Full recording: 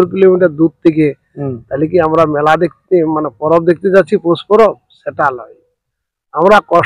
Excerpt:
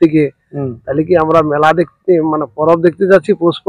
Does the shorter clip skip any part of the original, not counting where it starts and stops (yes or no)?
no